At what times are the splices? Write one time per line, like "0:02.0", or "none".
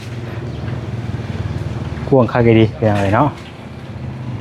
none